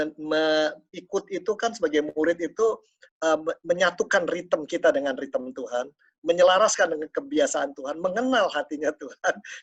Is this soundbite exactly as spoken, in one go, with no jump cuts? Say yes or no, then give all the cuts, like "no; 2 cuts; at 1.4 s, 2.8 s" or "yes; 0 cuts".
yes; 0 cuts